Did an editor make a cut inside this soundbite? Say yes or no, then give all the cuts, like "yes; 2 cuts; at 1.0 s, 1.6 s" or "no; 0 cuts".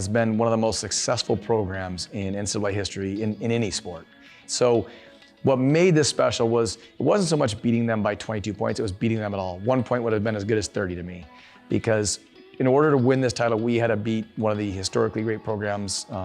yes; 1 cut; at 4.4 s